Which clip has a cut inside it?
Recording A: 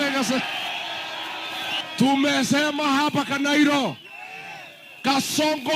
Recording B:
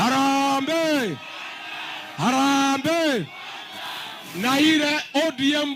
A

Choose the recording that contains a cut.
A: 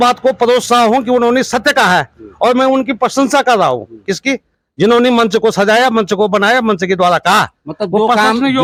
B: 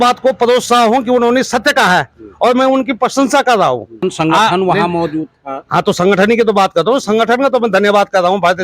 B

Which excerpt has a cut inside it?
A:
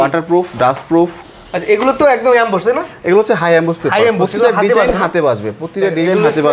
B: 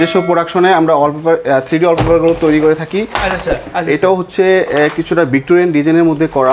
B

